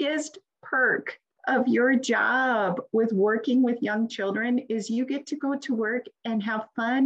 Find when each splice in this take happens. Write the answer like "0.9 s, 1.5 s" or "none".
none